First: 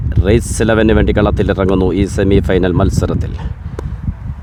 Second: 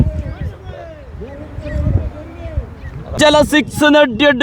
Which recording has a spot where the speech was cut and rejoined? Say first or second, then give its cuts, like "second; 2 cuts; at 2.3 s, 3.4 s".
second; 1 cut; at 3.2 s